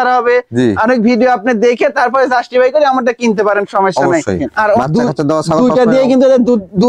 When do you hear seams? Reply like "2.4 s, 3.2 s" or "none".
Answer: 4.8 s